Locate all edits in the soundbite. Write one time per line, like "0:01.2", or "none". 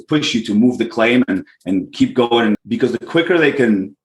0:02.6